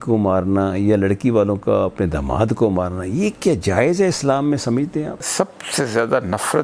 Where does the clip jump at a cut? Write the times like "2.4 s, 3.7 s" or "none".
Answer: 5.3 s